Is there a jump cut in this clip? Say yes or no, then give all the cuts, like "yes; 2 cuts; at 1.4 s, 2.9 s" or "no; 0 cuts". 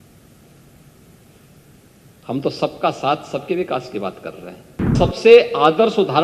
yes; 1 cut; at 4.9 s